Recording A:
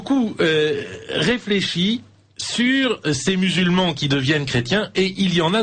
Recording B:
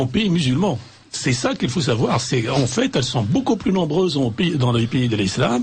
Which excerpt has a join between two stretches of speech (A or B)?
A